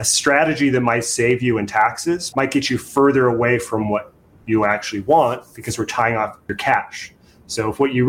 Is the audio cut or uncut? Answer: cut